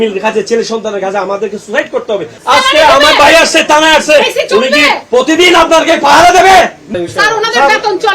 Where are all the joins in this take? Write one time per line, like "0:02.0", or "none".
0:02.3
0:06.8